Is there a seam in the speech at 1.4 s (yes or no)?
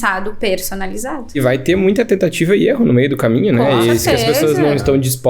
yes